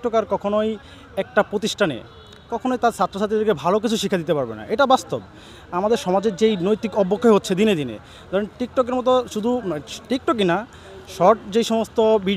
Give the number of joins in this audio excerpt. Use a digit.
0